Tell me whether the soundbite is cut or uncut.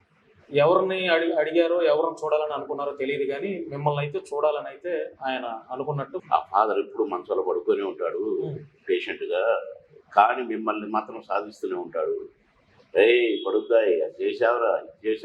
cut